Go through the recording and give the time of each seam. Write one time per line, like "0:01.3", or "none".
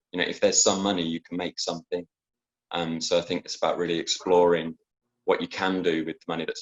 none